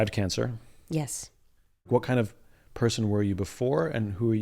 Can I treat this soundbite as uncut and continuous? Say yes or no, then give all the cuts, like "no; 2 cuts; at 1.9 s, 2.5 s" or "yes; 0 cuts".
no; 1 cut; at 1.9 s